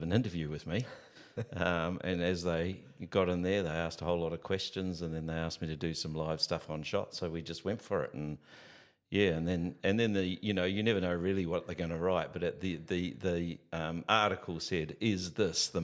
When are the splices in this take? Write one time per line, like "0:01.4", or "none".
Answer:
none